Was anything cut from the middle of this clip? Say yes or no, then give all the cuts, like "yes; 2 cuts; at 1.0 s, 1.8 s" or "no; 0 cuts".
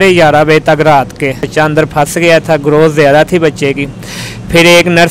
yes; 1 cut; at 1.4 s